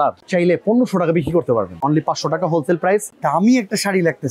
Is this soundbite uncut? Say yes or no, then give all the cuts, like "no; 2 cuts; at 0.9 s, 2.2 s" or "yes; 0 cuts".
no; 2 cuts; at 1.8 s, 3.1 s